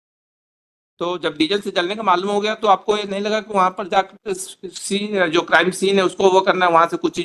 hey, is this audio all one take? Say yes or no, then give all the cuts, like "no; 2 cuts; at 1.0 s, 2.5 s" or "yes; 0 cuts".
yes; 0 cuts